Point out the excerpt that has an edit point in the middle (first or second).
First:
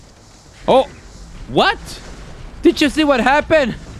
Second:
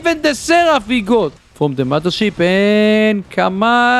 second